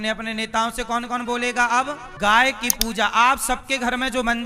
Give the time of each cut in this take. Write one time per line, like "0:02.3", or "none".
0:02.1